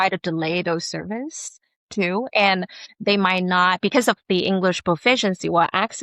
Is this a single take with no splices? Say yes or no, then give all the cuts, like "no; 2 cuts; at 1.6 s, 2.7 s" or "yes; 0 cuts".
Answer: yes; 0 cuts